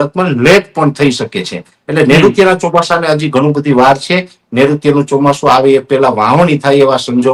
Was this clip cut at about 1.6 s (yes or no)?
no